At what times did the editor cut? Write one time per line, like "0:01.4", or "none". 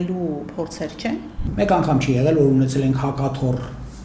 0:01.4